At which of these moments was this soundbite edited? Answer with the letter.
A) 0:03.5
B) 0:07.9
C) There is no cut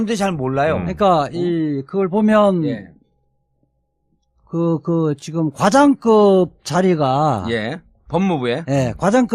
C